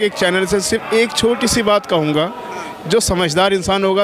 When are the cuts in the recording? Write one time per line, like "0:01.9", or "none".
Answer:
none